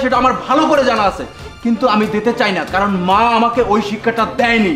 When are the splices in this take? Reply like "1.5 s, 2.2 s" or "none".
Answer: none